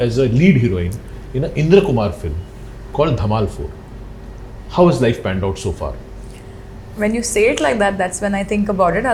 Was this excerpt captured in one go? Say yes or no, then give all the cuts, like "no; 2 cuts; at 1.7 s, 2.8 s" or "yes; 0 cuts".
yes; 0 cuts